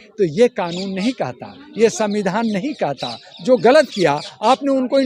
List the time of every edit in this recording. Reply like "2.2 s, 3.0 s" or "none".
none

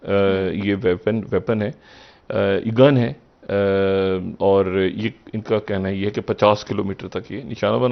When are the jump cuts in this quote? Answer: none

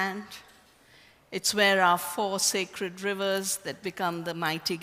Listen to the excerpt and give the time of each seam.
1.5 s

